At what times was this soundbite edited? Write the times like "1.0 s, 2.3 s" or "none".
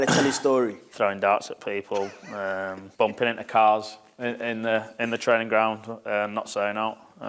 0.9 s, 2.8 s